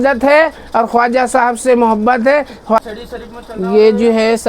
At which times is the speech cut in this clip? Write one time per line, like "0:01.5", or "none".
0:02.8